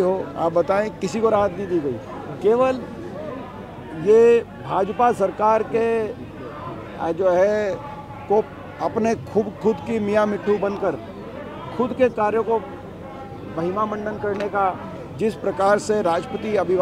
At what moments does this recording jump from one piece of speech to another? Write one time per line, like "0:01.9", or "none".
none